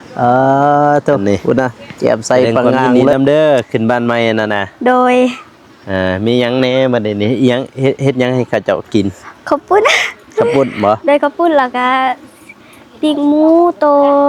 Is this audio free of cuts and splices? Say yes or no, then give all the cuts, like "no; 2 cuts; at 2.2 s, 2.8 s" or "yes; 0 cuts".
no; 1 cut; at 3.1 s